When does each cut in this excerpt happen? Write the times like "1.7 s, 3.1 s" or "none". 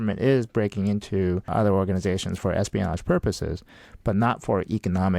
1.5 s